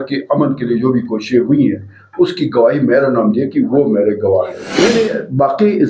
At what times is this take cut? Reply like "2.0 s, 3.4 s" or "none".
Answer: 4.8 s